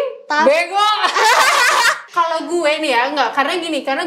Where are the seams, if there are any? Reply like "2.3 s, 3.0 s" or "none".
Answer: 2.0 s

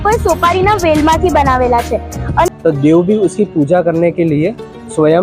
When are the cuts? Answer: 2.5 s

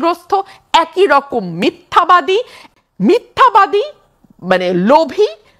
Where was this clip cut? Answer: 2.6 s

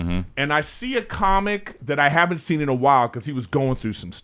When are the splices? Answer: none

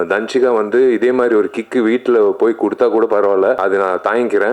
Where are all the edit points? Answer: 3.6 s

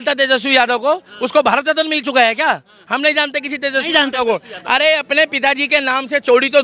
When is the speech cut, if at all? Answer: none

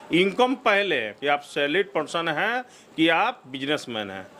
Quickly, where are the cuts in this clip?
none

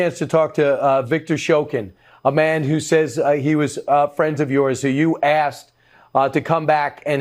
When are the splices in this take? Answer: none

